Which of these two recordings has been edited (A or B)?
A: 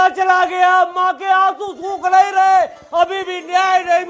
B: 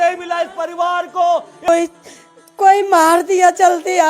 B